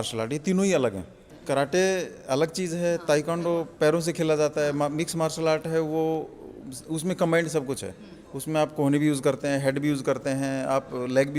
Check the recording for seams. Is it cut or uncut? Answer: uncut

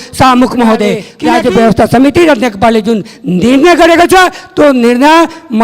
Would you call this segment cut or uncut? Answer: cut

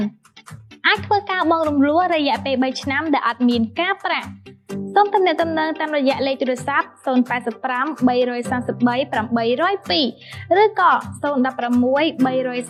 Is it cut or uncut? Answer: uncut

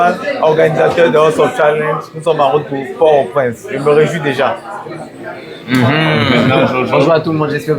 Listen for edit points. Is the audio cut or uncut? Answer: uncut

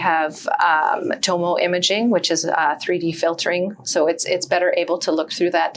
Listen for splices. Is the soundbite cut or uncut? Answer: uncut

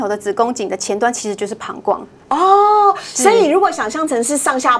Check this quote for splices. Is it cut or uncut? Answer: uncut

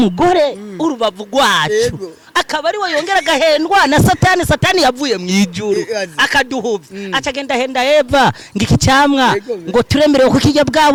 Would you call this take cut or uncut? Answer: uncut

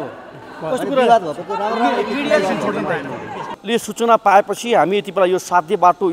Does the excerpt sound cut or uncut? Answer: uncut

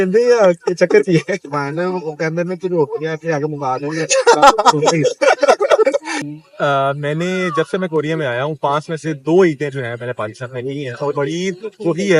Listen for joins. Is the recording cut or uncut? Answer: uncut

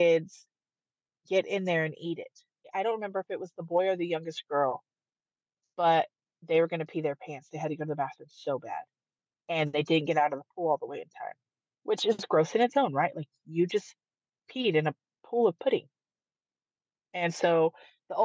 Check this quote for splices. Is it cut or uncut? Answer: uncut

